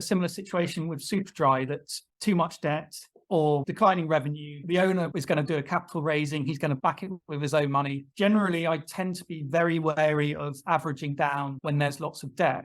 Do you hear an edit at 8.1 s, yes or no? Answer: yes